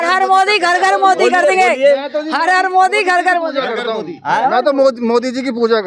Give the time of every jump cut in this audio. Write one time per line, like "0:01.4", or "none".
none